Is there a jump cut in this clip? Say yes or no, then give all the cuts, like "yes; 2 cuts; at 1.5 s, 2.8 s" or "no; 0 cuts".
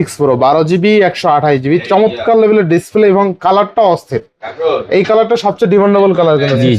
no; 0 cuts